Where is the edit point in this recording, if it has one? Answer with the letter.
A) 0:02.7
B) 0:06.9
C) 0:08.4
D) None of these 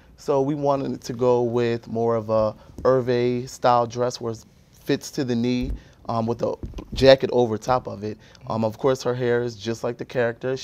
A